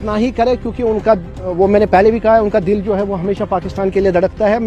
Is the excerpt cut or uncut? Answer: uncut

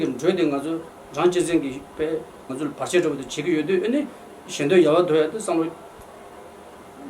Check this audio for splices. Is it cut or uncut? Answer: cut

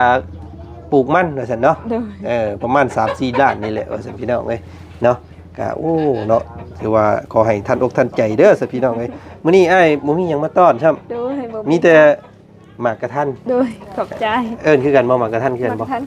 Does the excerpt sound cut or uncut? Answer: uncut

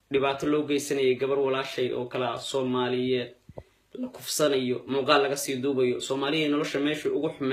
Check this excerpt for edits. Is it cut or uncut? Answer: uncut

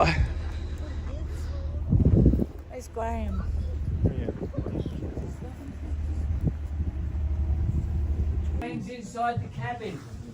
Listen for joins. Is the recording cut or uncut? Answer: cut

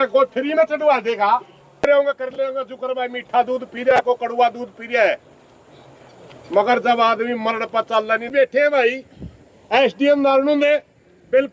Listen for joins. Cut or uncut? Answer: cut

